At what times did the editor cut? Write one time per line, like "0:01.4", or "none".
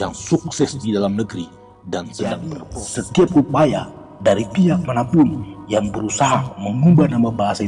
0:02.7